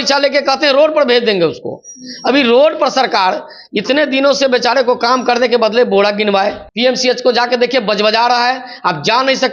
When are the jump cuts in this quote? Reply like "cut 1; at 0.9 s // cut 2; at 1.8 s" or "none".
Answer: cut 1; at 6.6 s